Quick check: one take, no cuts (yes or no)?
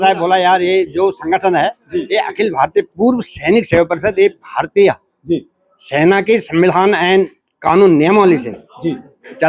yes